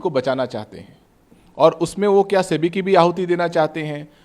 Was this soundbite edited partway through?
no; 0 cuts

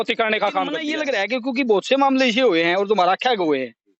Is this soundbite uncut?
no; 1 cut; at 0.9 s

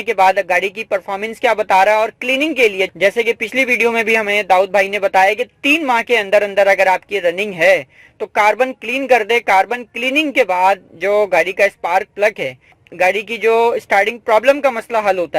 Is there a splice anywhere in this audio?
no; 0 cuts

